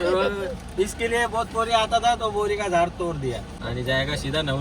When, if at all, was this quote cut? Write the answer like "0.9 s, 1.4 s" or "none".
3.5 s